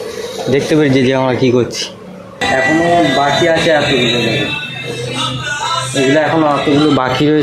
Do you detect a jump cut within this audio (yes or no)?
yes